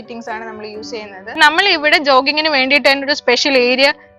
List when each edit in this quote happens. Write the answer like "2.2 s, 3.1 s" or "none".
1.4 s